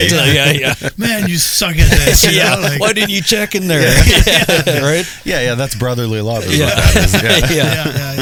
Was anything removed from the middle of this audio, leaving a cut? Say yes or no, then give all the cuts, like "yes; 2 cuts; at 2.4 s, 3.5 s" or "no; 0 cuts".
no; 0 cuts